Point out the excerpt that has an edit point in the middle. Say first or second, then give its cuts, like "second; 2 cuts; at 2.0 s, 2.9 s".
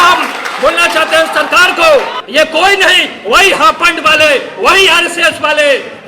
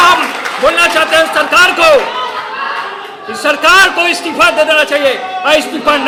first; 1 cut; at 2.2 s